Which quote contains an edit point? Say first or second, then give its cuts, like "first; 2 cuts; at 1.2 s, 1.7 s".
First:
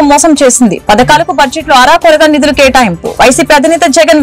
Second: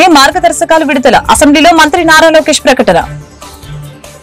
second; 1 cut; at 3.1 s